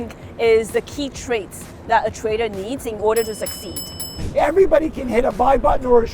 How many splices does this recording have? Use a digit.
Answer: 1